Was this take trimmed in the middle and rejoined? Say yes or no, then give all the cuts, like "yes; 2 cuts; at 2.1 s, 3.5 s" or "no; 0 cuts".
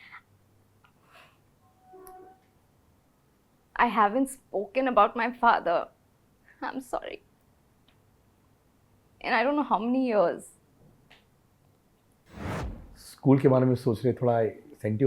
yes; 1 cut; at 12.5 s